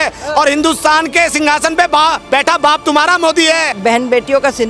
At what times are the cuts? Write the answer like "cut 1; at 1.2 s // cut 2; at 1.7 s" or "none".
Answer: cut 1; at 3.7 s